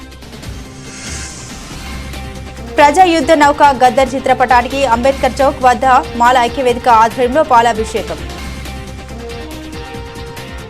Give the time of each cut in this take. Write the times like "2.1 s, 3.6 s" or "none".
none